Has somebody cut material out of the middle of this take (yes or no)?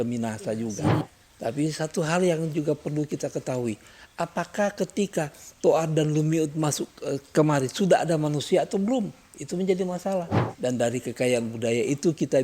yes